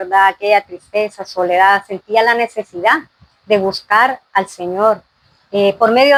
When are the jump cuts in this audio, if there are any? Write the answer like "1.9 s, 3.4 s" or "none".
none